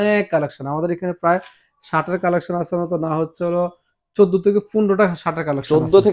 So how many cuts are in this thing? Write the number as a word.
zero